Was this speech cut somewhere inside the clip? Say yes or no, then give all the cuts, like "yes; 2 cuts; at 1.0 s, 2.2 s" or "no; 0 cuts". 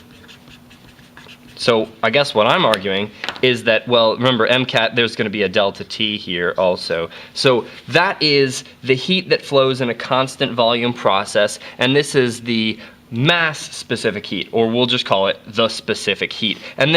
yes; 1 cut; at 11.3 s